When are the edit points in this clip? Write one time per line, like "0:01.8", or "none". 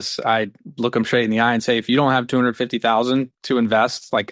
0:03.4

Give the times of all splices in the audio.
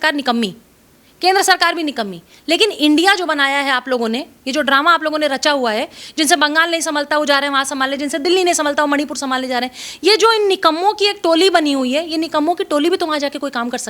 none

